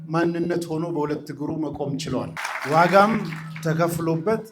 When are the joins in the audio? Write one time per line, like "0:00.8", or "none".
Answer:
0:02.4